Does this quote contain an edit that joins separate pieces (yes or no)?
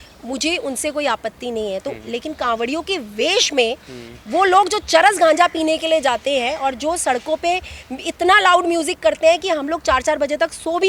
no